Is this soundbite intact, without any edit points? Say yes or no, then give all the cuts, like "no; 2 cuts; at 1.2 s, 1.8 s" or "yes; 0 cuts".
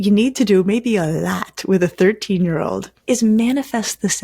no; 1 cut; at 2.9 s